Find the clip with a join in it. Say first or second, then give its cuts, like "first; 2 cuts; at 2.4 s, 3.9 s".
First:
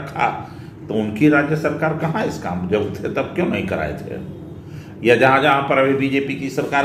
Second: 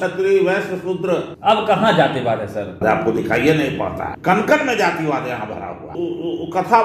second; 4 cuts; at 1.3 s, 2.8 s, 4.1 s, 5.9 s